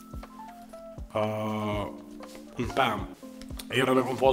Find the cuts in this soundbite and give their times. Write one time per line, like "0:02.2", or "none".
0:03.1

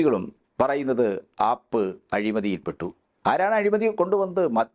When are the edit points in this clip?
none

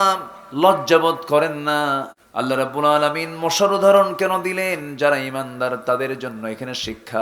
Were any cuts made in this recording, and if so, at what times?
0:02.2

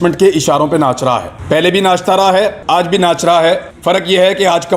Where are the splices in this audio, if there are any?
0:01.3
0:02.6
0:03.7

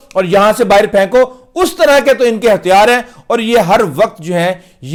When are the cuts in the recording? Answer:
none

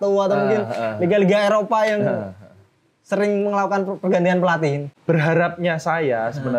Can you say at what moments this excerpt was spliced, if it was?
0:04.9

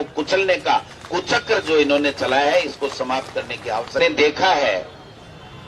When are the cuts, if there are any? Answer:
0:04.0

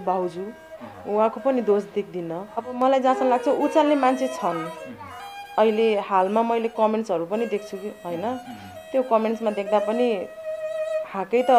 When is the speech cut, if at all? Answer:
0:02.8

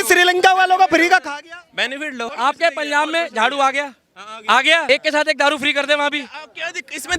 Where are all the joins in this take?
0:02.3
0:04.8

